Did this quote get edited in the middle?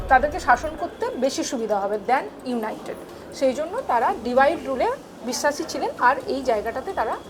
no; 0 cuts

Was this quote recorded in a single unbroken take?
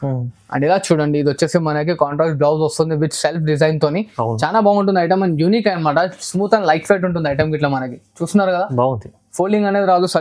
yes; 0 cuts

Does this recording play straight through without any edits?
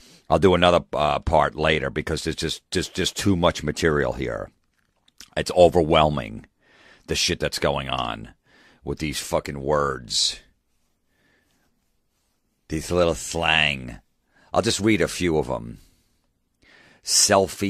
yes; 0 cuts

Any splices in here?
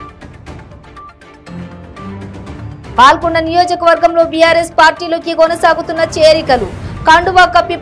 yes; 1 cut; at 2.7 s

